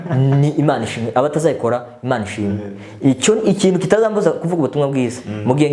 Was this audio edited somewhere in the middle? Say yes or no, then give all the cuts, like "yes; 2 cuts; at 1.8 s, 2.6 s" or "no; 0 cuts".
no; 0 cuts